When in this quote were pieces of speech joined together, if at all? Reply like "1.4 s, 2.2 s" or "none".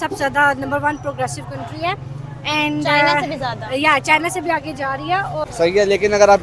5.5 s